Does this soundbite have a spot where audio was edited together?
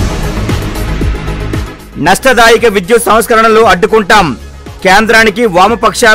yes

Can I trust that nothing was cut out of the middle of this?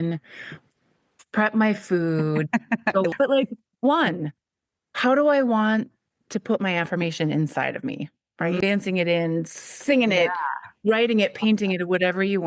no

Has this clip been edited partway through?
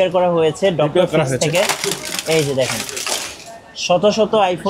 no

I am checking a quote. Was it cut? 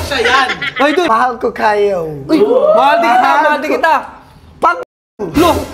yes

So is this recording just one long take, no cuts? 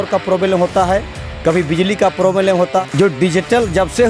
no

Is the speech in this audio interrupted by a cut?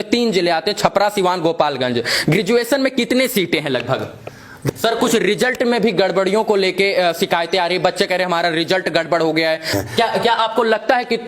yes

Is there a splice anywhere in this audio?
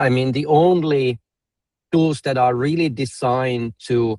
no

